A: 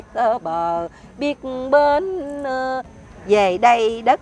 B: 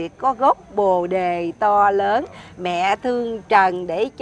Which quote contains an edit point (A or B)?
A